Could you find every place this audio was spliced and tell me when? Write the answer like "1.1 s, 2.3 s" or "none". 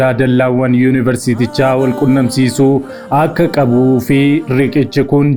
none